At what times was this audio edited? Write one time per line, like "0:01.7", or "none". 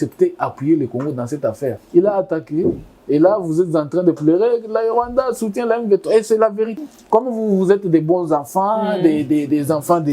0:01.8
0:06.8